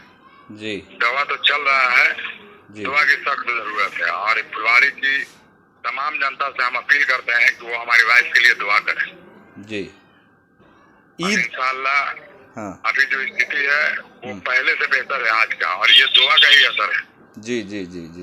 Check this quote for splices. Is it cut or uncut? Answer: uncut